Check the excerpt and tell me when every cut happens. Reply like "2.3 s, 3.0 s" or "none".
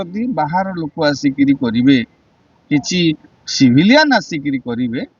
none